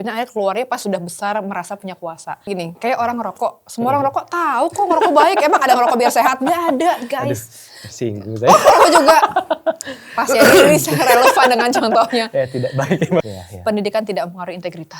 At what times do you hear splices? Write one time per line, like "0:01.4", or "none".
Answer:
0:02.5
0:13.3